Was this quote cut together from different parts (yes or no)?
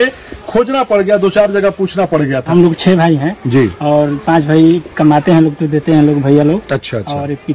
yes